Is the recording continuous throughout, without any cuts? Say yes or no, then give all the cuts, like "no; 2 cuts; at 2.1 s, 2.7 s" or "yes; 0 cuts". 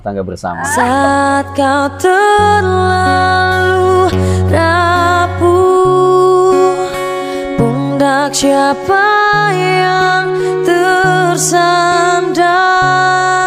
yes; 0 cuts